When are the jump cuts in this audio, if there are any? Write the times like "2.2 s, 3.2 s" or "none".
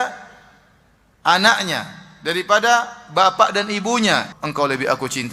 4.3 s